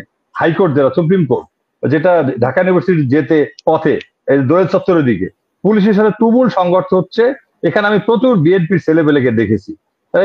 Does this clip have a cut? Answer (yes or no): no